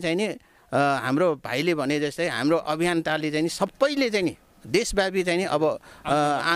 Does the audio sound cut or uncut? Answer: uncut